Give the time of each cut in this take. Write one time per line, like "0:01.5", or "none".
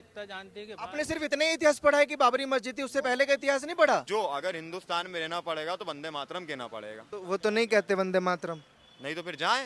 0:04.1
0:07.1

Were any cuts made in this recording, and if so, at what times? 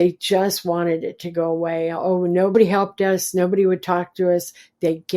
0:02.5

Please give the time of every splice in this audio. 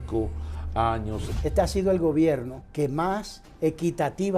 0:01.3
0:02.6
0:03.4

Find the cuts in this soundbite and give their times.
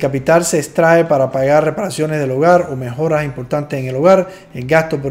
none

